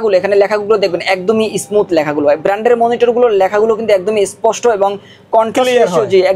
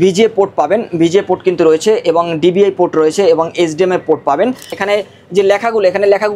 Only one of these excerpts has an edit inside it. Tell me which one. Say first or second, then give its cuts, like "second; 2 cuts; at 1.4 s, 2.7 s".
second; 1 cut; at 4.7 s